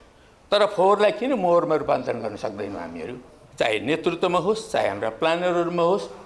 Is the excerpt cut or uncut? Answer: cut